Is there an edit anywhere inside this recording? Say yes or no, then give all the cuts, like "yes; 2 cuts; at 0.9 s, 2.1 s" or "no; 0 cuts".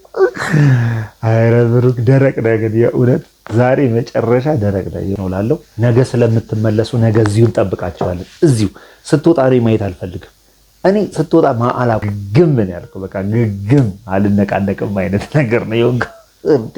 yes; 2 cuts; at 5.1 s, 12.0 s